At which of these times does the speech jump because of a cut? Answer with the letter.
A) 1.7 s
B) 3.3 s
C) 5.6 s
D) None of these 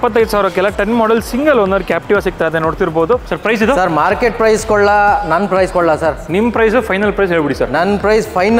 B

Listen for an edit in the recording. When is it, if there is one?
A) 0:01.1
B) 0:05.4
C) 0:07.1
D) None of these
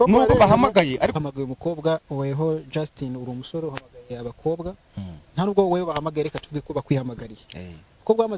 A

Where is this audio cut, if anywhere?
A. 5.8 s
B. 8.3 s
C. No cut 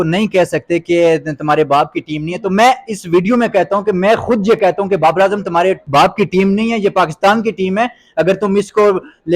A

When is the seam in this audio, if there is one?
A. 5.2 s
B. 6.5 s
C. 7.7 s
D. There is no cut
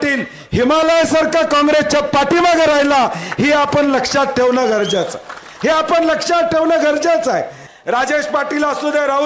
C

